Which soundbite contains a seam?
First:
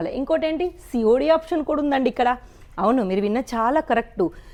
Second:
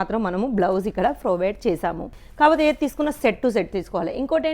second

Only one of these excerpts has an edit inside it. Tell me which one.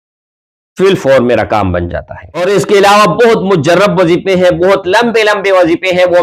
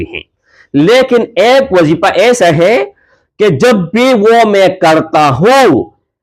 first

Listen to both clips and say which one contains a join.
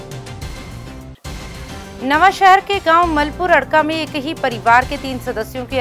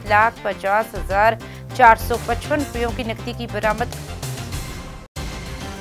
first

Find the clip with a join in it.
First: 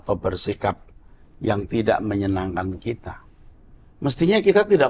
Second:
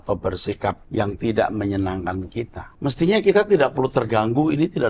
second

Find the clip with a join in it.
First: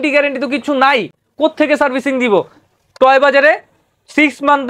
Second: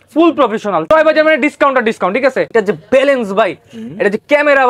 second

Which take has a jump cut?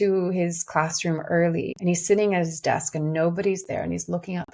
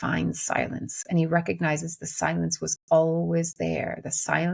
first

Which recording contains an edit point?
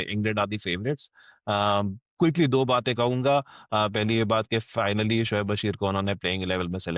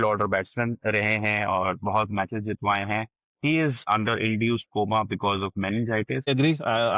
second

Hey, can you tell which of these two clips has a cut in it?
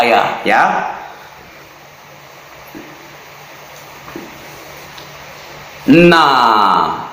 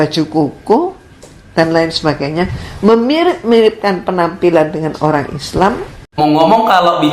second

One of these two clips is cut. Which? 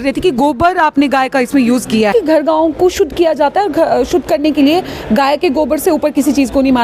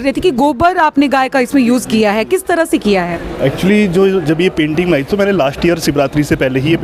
first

